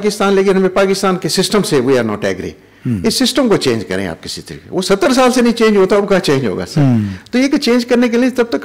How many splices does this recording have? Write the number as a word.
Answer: zero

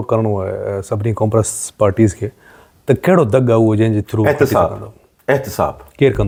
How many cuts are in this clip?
zero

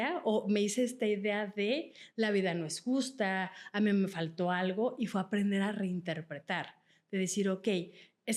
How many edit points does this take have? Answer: zero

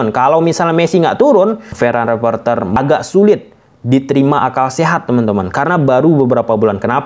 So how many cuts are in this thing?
two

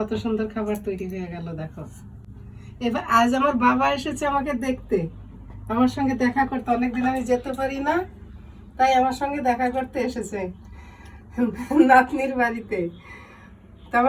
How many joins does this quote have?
zero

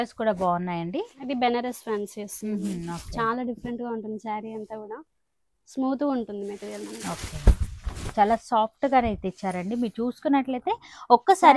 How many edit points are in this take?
zero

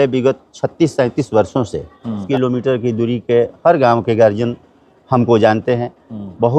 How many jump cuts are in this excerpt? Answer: one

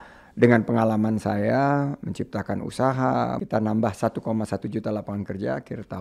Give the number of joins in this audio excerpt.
one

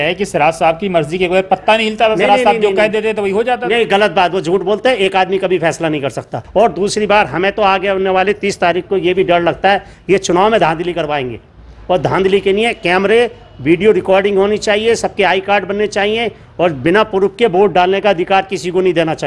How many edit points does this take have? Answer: one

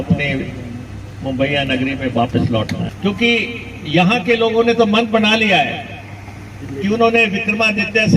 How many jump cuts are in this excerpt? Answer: one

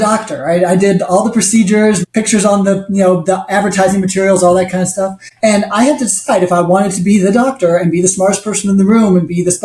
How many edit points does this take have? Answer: two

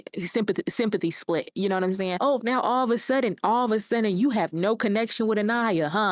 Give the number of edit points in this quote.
one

